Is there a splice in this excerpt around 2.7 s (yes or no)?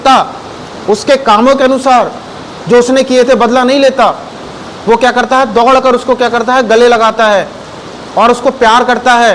no